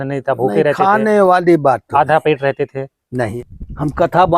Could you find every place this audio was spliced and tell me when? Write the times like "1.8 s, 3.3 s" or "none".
3.4 s